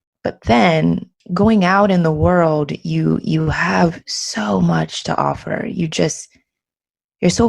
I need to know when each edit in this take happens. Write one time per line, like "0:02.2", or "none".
0:01.2